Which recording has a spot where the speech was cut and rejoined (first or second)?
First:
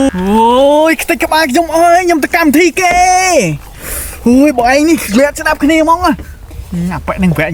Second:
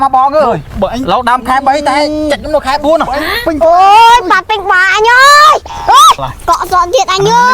second